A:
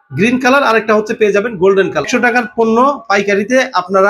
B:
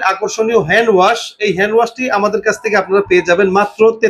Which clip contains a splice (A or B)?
A